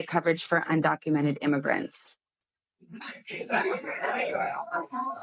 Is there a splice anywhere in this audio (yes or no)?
no